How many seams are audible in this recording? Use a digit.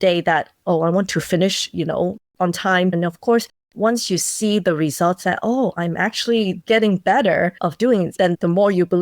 2